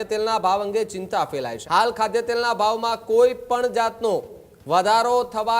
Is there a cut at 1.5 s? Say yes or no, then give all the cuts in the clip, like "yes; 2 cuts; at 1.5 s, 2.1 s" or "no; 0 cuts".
yes; 1 cut; at 1.5 s